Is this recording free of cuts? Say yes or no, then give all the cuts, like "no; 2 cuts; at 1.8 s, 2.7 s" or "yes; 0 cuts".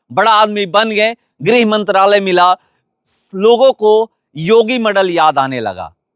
no; 1 cut; at 1.3 s